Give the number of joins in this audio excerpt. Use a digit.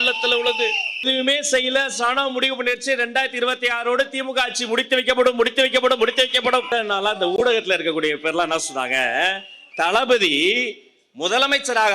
2